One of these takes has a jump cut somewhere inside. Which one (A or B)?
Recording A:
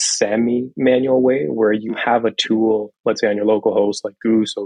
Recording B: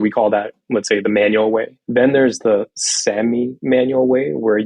B